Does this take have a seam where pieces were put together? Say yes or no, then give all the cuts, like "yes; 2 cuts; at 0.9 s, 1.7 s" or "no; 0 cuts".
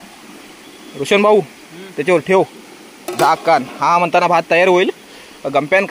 no; 0 cuts